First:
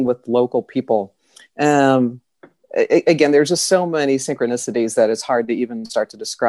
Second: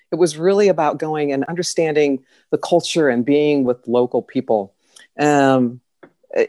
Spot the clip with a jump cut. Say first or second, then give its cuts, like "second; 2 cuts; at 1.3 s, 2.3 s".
second; 1 cut; at 1.5 s